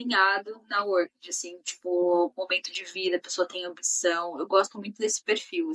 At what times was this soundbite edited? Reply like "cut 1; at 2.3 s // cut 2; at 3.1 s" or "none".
none